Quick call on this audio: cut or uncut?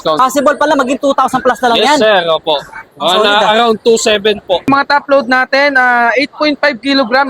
cut